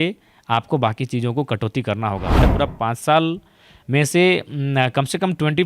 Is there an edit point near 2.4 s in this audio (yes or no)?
yes